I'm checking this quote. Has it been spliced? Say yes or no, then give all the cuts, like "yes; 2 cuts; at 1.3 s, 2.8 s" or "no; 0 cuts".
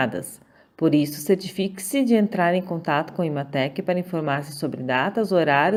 no; 0 cuts